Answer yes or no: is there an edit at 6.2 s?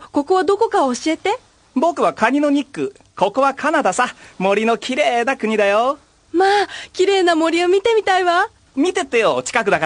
no